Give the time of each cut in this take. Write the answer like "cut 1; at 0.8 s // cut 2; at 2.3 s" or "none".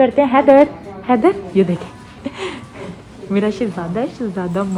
none